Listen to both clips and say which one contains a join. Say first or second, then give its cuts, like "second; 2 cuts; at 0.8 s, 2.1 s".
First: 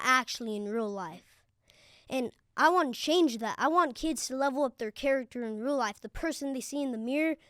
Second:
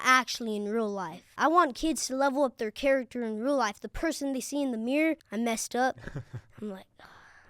second; 2 cuts; at 1.3 s, 5.3 s